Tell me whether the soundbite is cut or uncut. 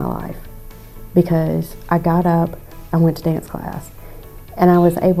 uncut